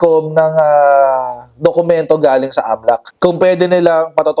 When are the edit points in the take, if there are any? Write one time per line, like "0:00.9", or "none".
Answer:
none